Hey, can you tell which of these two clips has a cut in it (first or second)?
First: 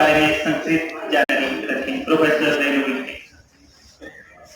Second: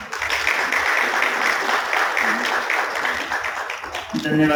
first